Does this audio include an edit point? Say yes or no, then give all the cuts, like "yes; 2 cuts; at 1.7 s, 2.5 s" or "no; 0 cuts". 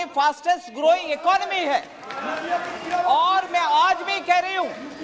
no; 0 cuts